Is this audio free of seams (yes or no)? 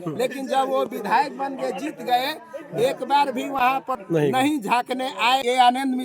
no